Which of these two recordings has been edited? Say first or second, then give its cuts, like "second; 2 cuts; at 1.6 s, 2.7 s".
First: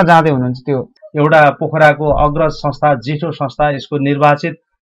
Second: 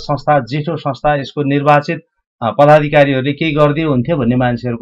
first; 1 cut; at 1.0 s